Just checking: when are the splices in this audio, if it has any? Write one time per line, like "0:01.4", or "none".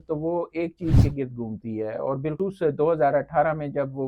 0:02.4